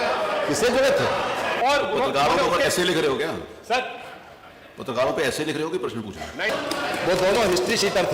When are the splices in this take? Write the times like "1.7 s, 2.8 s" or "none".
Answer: 1.5 s, 6.5 s